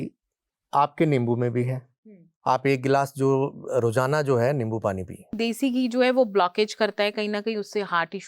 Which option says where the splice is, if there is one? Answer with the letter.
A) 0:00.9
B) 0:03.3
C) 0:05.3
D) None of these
C